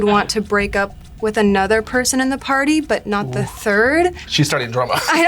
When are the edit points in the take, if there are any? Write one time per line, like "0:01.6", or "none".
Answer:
0:04.2